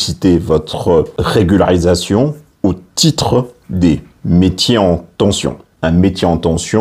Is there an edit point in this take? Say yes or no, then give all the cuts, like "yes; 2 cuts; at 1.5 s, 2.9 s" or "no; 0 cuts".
yes; 2 cuts; at 1.2 s, 5.6 s